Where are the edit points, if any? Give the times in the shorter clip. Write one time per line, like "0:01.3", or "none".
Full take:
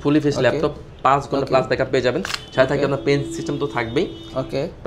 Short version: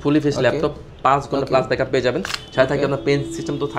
none